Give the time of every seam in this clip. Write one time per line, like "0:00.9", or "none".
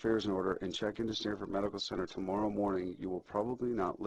none